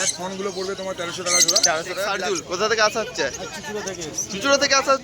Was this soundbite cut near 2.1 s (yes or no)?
yes